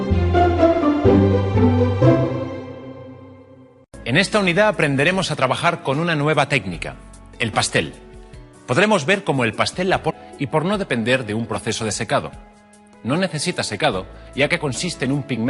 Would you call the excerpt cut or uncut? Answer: uncut